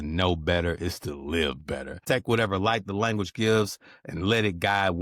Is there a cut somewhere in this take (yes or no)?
yes